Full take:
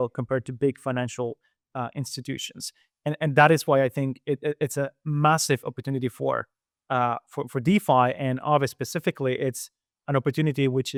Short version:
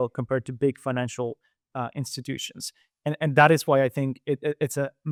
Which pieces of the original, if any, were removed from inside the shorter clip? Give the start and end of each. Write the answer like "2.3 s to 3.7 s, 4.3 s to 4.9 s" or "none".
none